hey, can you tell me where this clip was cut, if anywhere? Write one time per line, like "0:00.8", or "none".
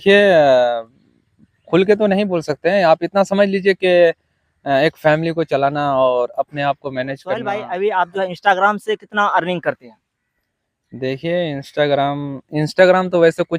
0:07.5

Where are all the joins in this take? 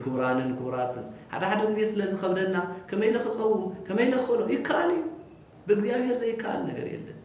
none

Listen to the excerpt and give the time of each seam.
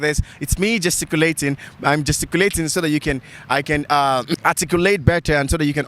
0:04.3

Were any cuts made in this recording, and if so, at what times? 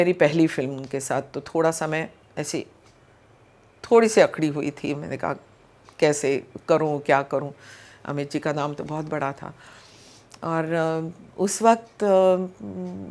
none

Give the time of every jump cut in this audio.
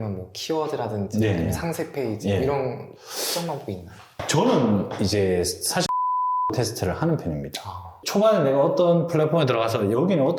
0:08.0

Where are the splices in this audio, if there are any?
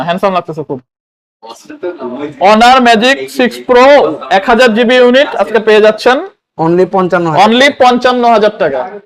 none

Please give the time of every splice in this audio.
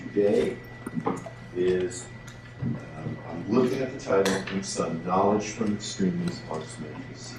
0:01.3

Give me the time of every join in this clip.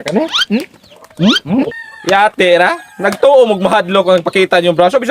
0:01.7

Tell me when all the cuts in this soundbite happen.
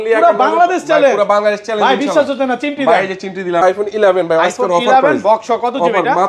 0:03.6

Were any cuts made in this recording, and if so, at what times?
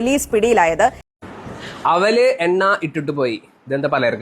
0:01.0

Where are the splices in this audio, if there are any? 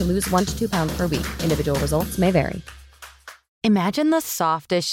0:03.5

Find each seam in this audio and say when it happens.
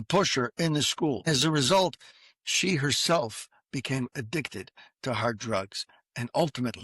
0:01.3

